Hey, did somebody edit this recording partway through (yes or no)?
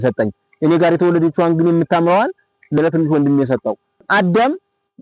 yes